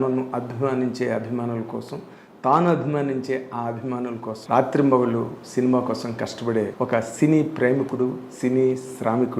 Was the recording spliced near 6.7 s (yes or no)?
yes